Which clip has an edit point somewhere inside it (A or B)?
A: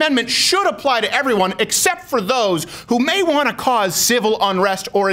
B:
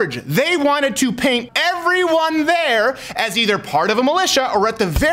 B